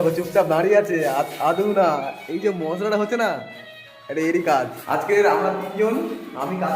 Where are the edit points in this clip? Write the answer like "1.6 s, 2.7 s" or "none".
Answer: 4.8 s